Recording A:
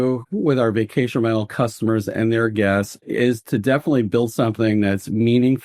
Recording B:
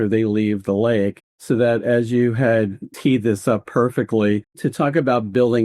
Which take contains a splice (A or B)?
B